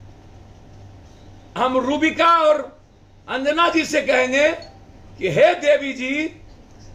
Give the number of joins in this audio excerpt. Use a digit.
0